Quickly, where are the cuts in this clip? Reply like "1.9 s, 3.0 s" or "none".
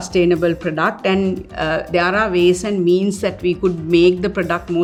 none